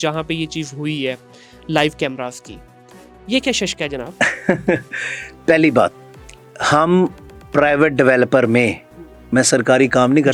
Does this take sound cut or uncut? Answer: uncut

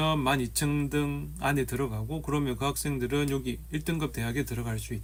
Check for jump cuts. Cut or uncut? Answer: uncut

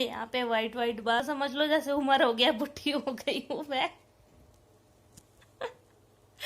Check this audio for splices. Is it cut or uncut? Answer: cut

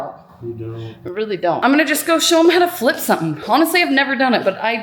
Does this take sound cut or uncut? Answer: cut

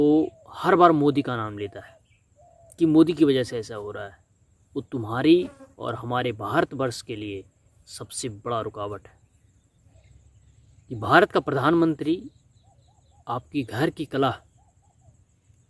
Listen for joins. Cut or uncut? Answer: cut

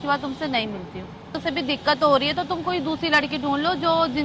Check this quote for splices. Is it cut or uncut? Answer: cut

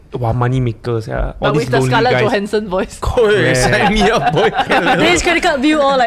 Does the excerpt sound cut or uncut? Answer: cut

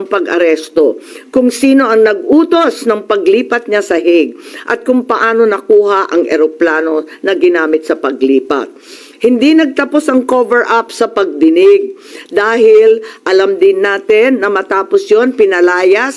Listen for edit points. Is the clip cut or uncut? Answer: uncut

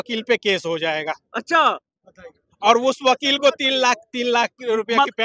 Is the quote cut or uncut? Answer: uncut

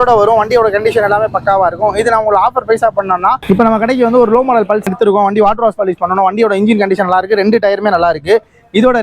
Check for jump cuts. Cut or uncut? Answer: cut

